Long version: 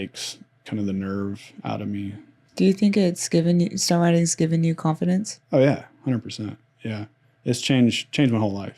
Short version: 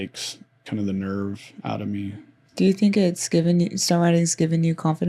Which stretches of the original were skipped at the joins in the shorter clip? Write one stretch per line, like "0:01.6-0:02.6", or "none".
none